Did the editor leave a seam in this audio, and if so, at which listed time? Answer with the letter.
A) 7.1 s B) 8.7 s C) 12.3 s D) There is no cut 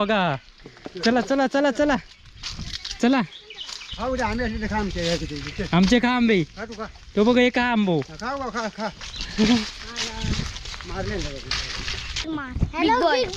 C